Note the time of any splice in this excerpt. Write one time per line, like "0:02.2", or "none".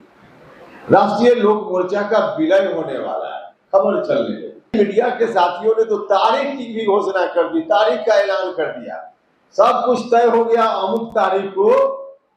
0:04.7